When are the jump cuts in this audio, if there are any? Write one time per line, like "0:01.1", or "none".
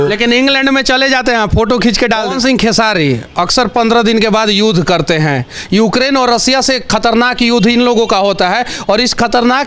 0:02.3